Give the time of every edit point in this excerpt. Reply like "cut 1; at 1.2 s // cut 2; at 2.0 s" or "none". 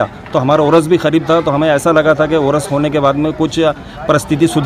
none